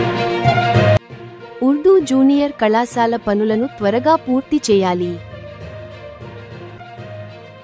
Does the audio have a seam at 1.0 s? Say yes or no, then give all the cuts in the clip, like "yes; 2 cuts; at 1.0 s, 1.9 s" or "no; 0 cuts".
yes; 1 cut; at 1.0 s